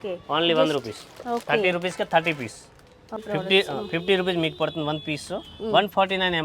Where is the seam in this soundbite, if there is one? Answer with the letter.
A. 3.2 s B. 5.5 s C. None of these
A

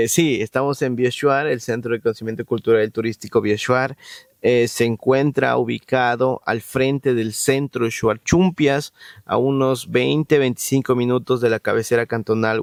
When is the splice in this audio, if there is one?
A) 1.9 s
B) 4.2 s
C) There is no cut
C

